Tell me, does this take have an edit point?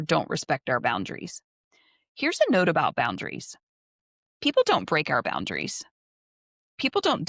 no; 0 cuts

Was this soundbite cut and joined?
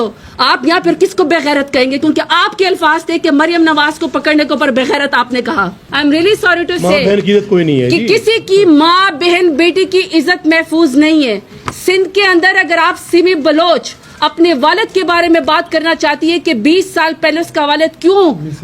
yes; 1 cut; at 5.8 s

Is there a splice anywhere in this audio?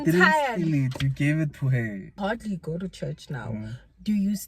yes; 1 cut; at 2.2 s

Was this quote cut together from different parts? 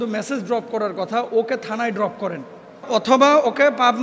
yes; 1 cut; at 2.9 s

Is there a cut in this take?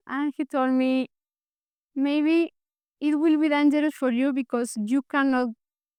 no; 0 cuts

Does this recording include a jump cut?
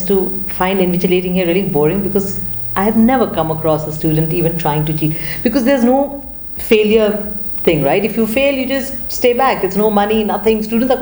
no; 0 cuts

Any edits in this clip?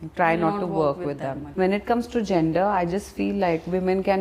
yes; 1 cut; at 1.4 s

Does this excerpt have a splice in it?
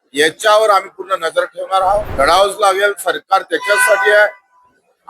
yes; 1 cut; at 2.1 s

